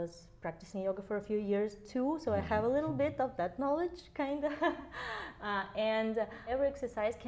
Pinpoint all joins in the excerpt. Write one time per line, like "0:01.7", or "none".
0:06.4